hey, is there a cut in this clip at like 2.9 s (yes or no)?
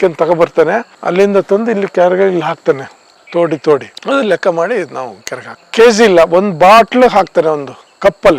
no